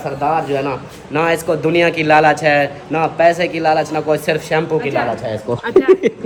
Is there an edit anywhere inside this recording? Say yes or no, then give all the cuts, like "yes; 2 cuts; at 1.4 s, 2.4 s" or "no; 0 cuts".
no; 0 cuts